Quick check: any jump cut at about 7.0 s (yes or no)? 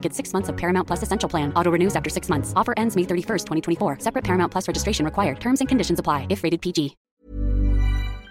yes